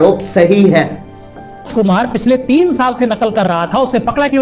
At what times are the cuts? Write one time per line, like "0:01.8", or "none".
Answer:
0:01.7

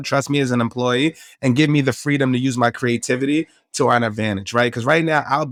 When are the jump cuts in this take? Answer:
none

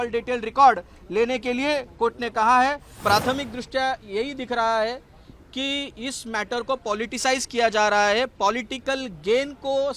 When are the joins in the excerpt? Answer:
0:02.9

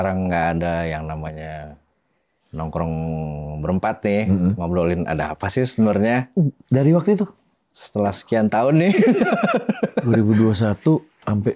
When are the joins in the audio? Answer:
none

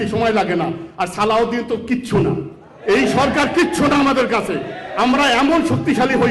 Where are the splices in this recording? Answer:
none

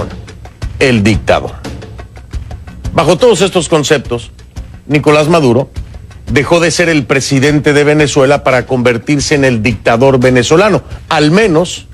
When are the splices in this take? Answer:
0:10.3

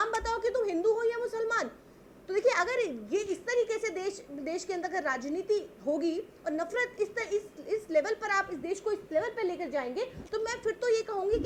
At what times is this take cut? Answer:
none

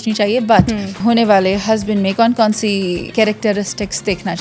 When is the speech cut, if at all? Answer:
0:01.0
0:03.1

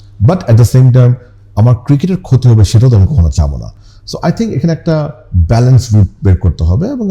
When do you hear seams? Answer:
none

